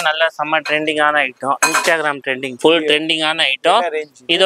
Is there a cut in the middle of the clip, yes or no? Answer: yes